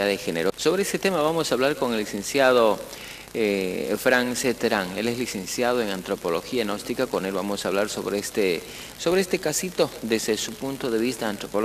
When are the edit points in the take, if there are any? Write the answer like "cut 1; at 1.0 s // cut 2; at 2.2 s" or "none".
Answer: cut 1; at 4.0 s